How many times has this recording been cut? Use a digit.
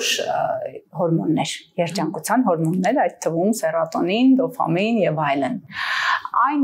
0